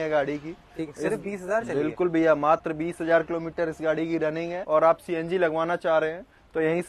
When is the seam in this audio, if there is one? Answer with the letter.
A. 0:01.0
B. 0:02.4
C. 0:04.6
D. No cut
C